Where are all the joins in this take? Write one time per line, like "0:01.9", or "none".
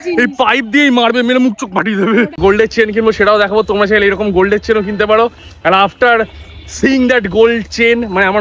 0:02.4